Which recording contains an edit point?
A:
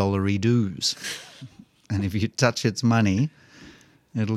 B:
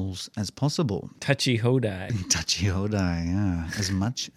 B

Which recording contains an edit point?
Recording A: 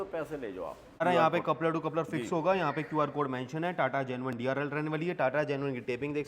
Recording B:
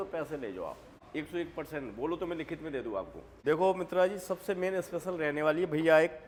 A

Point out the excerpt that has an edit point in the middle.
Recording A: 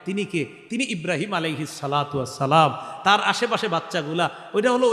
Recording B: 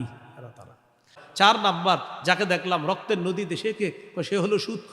B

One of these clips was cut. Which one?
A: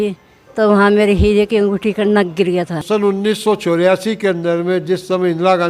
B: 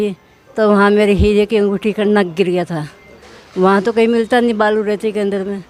A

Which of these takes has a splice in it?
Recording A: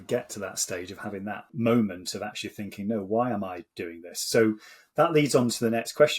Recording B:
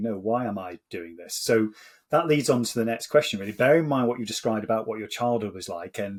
A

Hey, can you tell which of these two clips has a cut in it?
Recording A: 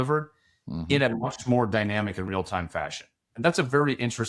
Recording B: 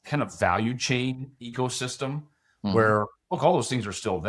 A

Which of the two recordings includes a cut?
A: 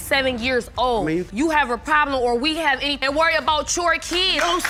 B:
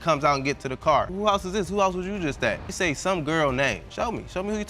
B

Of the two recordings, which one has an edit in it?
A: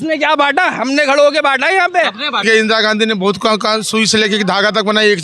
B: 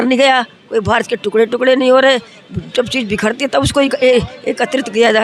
A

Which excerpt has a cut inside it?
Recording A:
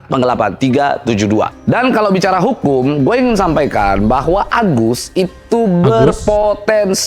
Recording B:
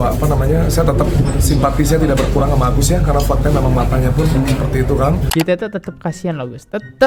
A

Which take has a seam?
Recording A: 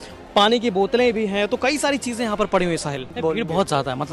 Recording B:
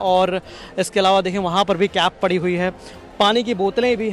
A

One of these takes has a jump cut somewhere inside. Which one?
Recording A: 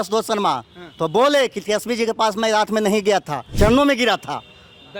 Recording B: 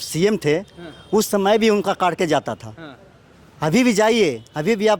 A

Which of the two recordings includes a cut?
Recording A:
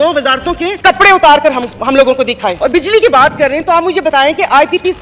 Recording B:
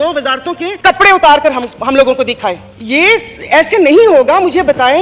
A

